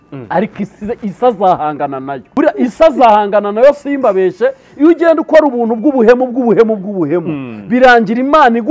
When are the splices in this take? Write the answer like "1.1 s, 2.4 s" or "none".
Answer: 2.3 s

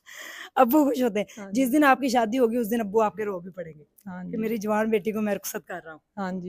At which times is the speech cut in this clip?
none

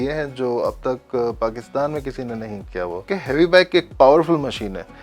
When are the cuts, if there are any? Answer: 3.1 s

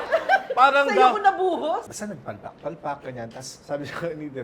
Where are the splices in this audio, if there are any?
1.8 s, 3.5 s

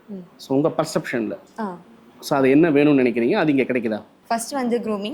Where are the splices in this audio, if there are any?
4.1 s

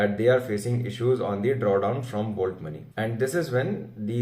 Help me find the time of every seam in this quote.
2.8 s

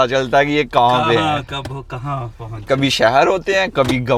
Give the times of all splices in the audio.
none

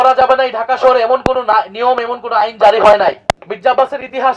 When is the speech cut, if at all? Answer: 3.3 s

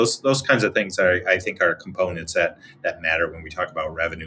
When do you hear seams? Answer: none

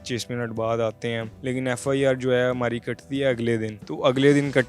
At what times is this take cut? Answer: 1.3 s, 3.8 s

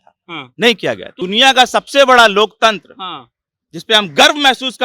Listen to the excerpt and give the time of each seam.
1.2 s

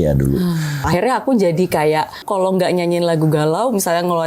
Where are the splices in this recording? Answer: 0.9 s, 2.2 s

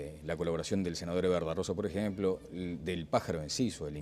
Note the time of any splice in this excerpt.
2.8 s

